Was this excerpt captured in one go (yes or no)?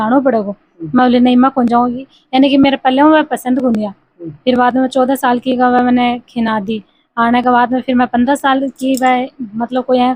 yes